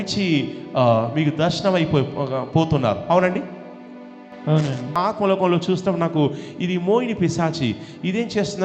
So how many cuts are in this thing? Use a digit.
1